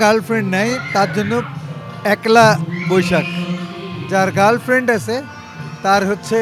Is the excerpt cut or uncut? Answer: uncut